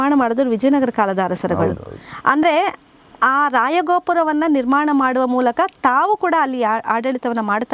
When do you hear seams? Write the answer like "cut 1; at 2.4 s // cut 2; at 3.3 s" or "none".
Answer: none